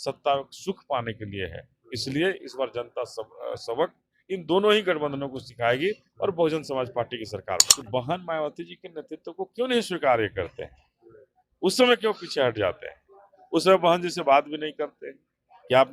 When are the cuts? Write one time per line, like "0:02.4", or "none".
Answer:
0:07.7